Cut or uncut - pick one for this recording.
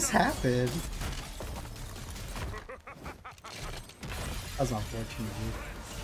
uncut